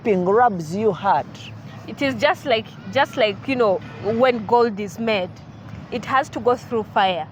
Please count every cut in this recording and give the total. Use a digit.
0